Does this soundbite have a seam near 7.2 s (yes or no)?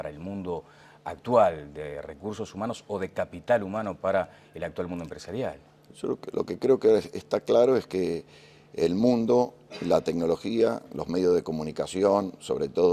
yes